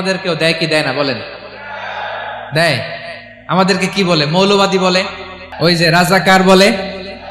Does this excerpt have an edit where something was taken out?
yes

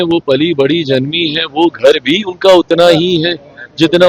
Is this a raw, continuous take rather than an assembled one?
yes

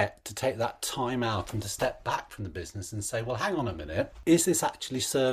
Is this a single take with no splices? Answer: no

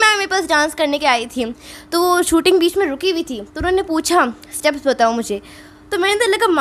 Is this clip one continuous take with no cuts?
yes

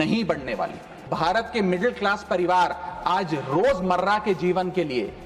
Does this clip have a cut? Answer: yes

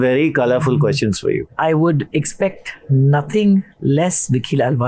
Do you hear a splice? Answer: yes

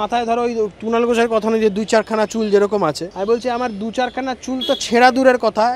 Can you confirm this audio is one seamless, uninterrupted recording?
no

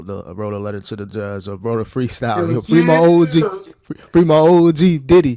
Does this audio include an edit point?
no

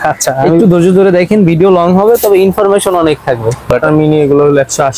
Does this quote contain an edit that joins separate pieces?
yes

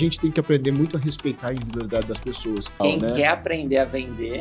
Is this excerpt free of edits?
no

